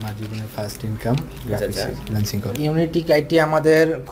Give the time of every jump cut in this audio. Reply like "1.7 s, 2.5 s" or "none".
2.5 s